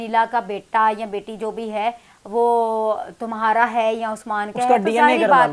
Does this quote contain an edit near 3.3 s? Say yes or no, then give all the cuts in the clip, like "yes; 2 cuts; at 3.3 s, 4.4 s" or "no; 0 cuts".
no; 0 cuts